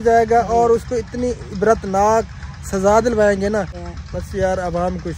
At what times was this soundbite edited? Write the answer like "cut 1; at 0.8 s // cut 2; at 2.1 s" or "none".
cut 1; at 3.8 s